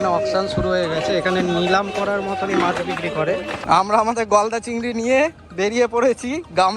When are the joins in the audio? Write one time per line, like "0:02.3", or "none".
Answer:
0:03.6
0:05.4